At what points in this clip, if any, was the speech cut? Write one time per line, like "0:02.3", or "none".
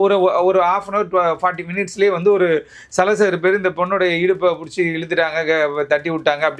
none